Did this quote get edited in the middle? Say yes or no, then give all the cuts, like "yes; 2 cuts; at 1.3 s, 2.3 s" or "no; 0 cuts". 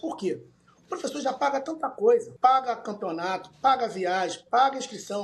yes; 1 cut; at 2.3 s